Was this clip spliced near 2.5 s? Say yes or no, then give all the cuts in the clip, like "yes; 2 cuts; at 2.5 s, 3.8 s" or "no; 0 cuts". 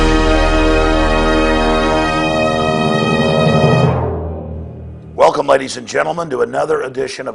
yes; 1 cut; at 2.5 s